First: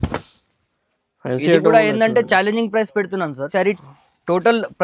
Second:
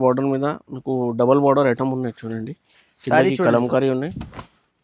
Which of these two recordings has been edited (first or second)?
first